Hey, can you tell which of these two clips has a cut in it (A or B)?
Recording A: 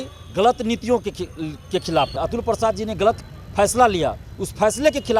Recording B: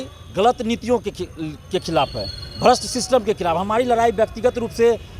A